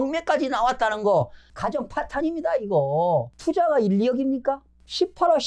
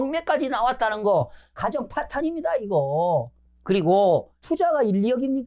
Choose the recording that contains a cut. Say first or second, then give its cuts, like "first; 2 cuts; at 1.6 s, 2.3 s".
first; 1 cut; at 3.3 s